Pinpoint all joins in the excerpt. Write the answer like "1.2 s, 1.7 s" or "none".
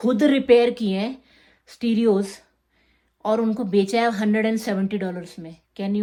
none